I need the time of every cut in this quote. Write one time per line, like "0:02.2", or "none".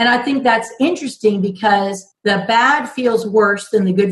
0:02.1